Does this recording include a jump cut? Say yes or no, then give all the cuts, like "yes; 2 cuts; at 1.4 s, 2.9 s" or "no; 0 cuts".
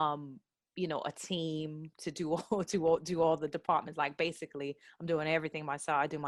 no; 0 cuts